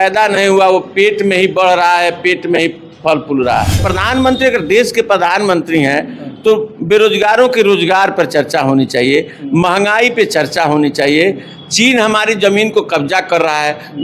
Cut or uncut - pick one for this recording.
cut